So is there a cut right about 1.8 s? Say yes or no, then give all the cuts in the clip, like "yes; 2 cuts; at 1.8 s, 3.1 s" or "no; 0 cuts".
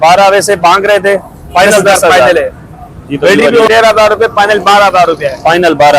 no; 1 cut; at 3.7 s